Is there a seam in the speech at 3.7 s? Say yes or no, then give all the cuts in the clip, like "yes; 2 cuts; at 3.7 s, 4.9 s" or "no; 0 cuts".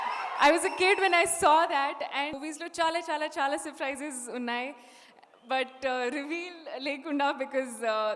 no; 1 cut; at 2.4 s